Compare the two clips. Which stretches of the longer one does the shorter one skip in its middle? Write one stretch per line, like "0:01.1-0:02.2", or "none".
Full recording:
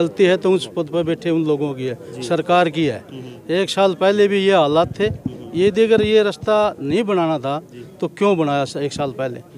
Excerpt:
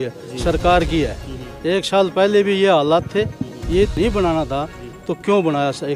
0:05.7-0:06.8

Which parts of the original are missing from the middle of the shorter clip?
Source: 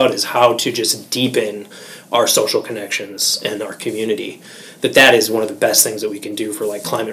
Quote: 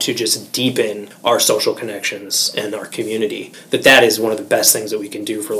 0:01.6-0:01.9
0:04.4-0:04.6

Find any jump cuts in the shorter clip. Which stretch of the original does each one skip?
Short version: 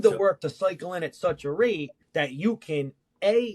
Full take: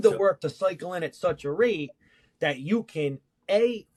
0:02.0-0:02.2

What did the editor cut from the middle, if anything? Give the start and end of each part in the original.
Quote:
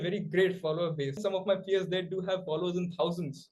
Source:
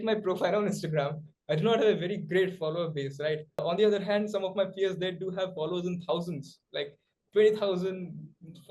0:03.2-0:04.3

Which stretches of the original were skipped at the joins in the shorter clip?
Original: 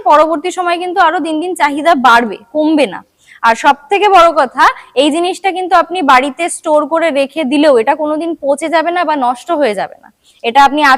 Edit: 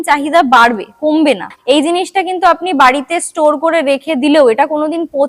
0:03.1-0:04.8

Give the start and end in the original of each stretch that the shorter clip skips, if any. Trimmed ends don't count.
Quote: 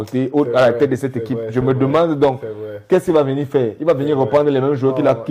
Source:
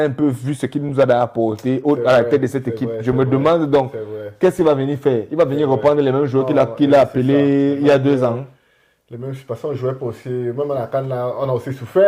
none

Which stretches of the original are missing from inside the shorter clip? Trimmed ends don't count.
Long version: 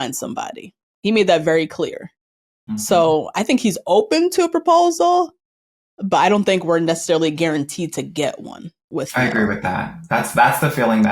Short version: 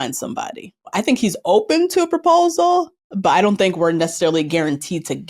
0:00.9-0:03.3
0:05.4-0:05.9

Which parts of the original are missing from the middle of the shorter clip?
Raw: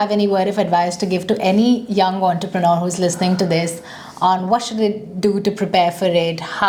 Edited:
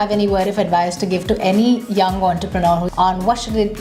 0:02.9-0:04.1

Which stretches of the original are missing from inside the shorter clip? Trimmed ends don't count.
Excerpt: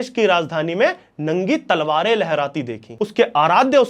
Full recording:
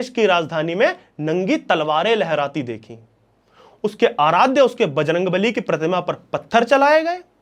0:02.8-0:03.6

